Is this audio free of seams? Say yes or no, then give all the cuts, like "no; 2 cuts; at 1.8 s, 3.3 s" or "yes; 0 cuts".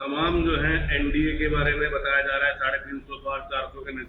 yes; 0 cuts